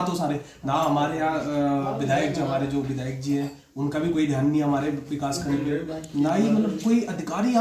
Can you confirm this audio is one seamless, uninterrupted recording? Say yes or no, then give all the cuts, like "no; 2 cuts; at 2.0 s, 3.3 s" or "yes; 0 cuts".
yes; 0 cuts